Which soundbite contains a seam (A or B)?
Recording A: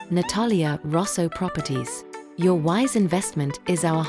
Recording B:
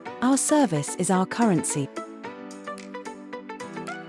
B